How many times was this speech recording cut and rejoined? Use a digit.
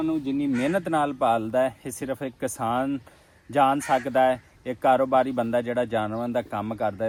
0